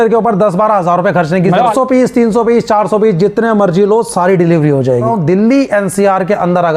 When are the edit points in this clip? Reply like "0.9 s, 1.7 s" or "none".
1.7 s, 5.1 s